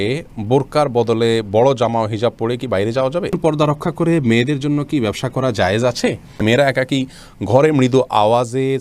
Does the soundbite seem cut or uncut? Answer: cut